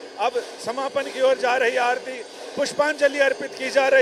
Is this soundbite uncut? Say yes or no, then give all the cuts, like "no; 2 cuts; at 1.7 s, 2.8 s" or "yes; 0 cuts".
yes; 0 cuts